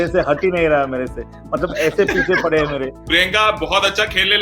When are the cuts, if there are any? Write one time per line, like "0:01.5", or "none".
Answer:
0:03.0